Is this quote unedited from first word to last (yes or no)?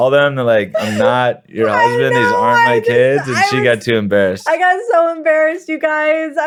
yes